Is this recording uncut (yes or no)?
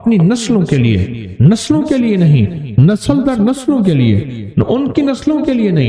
yes